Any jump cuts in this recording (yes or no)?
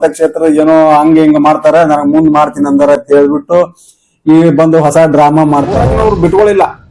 yes